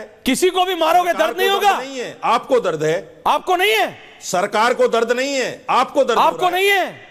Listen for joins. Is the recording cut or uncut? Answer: uncut